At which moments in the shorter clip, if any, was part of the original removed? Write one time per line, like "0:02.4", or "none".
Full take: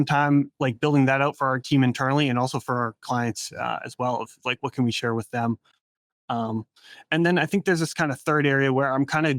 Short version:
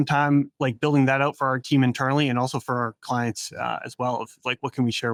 none